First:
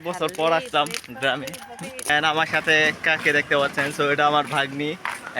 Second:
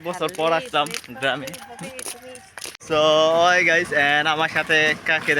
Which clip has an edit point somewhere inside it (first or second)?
first